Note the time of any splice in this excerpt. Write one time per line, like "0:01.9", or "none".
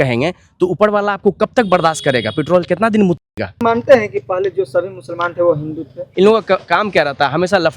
0:03.6
0:06.0